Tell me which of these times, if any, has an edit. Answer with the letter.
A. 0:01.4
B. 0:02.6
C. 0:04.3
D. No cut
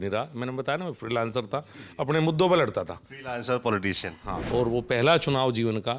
C